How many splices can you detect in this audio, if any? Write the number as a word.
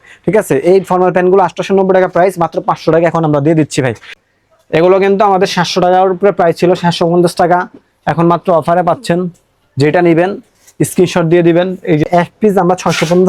two